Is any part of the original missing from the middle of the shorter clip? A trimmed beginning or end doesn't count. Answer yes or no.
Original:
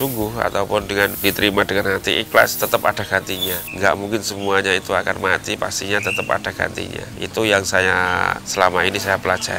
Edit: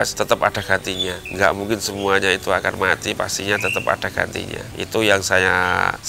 no